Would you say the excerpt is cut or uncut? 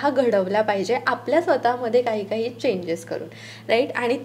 uncut